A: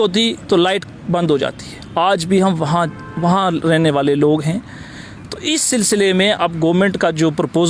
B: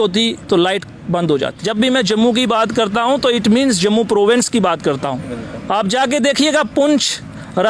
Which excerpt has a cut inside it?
B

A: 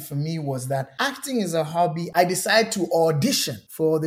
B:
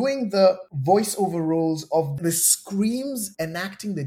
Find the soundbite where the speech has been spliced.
A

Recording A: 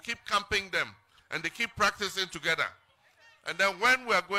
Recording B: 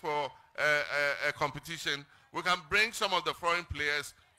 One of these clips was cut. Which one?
A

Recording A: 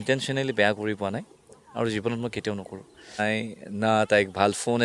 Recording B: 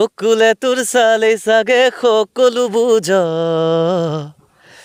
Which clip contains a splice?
A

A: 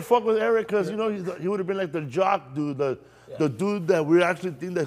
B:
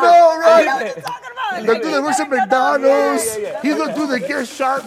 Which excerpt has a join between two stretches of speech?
B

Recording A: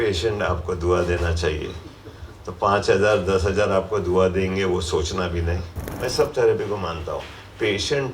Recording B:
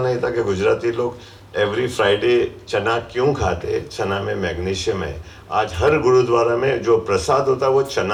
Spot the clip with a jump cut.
A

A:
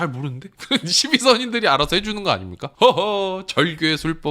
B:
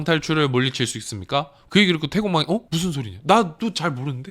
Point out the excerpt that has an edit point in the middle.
B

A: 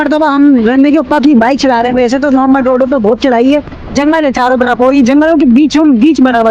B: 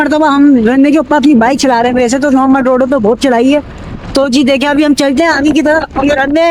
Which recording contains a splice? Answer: A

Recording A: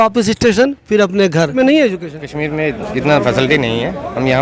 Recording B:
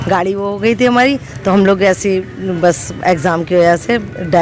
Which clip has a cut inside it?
A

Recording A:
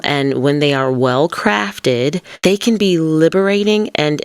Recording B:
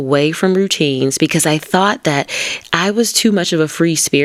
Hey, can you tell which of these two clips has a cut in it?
A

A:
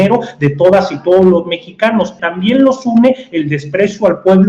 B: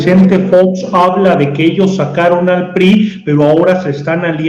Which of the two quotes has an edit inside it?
A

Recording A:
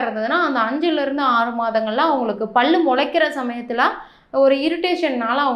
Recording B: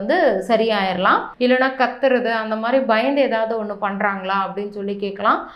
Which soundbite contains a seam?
B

